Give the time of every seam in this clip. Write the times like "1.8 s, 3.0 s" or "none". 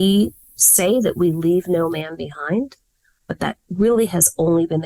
none